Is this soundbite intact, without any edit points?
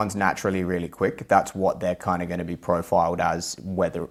yes; 0 cuts

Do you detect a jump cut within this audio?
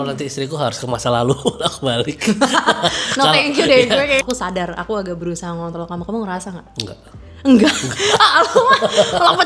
yes; 1 cut; at 4.2 s

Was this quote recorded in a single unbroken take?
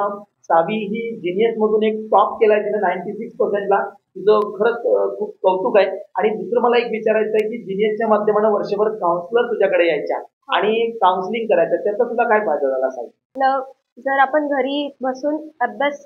yes; 0 cuts

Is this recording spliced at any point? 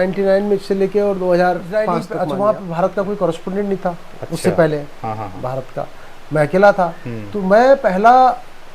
yes; 1 cut; at 2.1 s

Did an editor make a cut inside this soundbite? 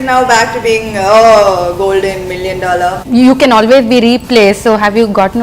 yes; 1 cut; at 3.0 s

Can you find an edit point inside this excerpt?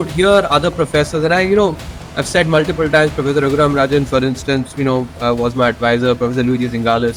no; 0 cuts

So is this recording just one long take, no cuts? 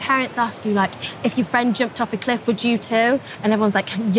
yes; 0 cuts

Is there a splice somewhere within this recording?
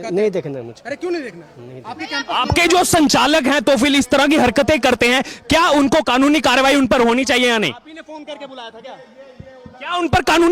no; 0 cuts

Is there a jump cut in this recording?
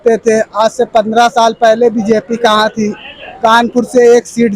no; 0 cuts

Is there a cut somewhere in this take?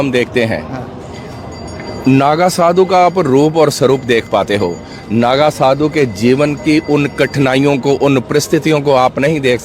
no; 0 cuts

